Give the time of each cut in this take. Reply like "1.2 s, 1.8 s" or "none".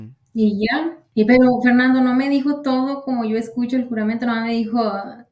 1.0 s